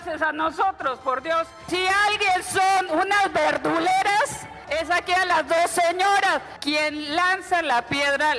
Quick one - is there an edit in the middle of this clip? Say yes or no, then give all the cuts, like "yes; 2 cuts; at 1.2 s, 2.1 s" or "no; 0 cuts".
yes; 3 cuts; at 1.6 s, 4.6 s, 6.5 s